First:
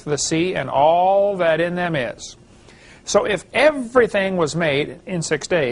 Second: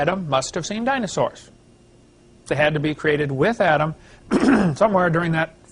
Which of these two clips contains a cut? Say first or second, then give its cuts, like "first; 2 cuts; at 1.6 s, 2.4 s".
first; 1 cut; at 3.2 s